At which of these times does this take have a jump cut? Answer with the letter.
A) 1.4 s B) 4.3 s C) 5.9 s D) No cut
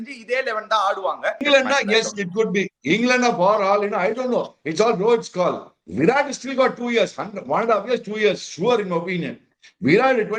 A